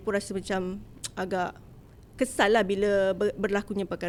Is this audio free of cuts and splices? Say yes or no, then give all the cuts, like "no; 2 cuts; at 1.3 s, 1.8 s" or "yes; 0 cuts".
yes; 0 cuts